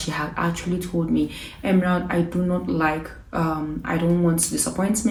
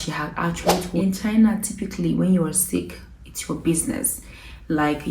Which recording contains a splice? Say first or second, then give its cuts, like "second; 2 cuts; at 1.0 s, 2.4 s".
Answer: second; 1 cut; at 0.9 s